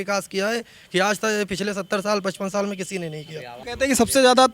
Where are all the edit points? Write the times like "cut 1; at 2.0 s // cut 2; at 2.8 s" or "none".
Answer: cut 1; at 3.6 s